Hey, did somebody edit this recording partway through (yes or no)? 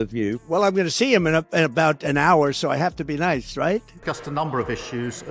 yes